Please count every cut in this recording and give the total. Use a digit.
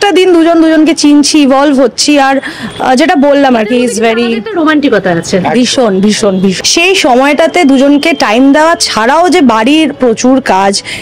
1